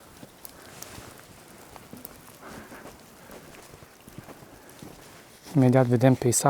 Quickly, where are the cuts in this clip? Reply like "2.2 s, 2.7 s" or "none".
5.4 s